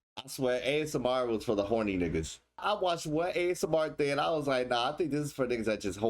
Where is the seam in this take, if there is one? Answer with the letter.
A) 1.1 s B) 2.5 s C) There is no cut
B